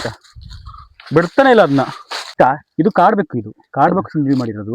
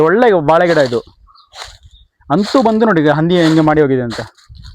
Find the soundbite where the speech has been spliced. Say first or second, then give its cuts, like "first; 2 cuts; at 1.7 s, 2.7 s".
first; 1 cut; at 2.2 s